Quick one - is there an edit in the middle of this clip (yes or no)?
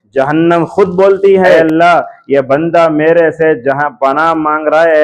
yes